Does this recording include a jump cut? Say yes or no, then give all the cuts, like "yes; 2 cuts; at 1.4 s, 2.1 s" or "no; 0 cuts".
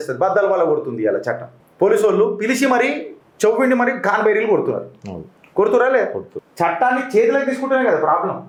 no; 0 cuts